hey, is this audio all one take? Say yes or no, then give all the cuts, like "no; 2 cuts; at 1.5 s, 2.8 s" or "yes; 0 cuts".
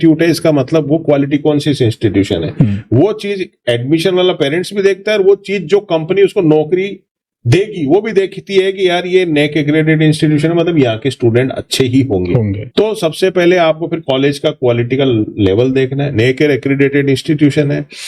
yes; 0 cuts